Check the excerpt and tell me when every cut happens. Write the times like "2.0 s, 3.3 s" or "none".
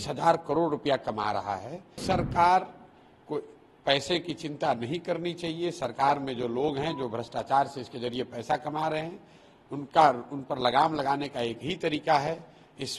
2.0 s